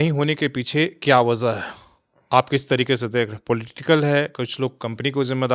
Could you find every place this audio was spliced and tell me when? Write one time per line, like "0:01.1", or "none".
none